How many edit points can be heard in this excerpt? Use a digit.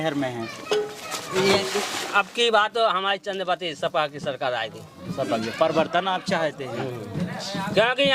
0